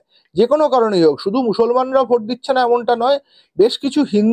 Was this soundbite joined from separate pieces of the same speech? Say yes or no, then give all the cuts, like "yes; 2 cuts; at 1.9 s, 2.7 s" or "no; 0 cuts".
no; 0 cuts